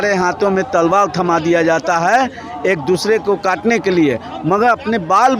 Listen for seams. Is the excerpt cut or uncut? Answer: uncut